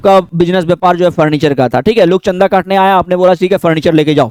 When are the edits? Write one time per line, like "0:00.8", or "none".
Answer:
none